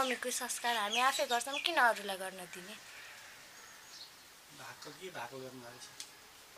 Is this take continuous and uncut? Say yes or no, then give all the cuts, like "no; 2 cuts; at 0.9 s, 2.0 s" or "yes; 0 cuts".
yes; 0 cuts